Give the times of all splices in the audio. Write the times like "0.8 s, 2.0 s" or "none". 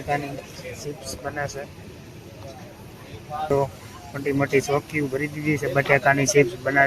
3.5 s